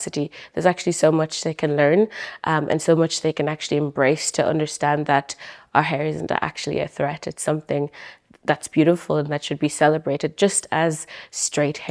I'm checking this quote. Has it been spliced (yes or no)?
no